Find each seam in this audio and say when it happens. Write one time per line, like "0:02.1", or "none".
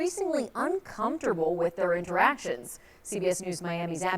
0:01.7